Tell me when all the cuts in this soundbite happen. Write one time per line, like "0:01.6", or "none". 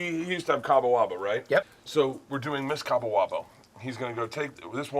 0:01.8

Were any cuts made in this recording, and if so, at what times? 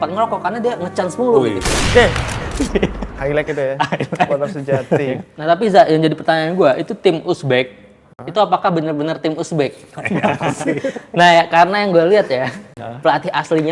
0:05.3

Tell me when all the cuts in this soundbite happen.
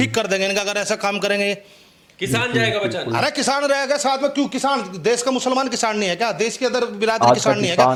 none

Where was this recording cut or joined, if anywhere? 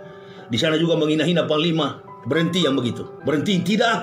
0:03.1

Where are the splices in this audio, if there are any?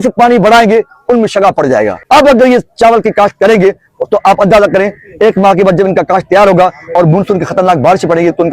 0:02.0

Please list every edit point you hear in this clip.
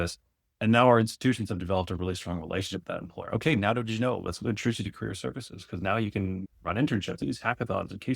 0:07.2

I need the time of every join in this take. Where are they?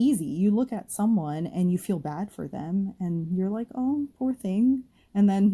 none

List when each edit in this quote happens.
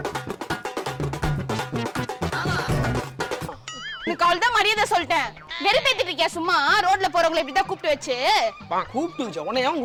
none

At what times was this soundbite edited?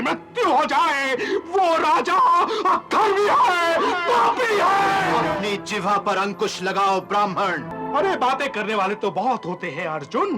0:05.2
0:07.7

